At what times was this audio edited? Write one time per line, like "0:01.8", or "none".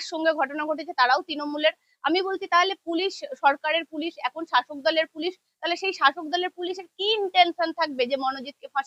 none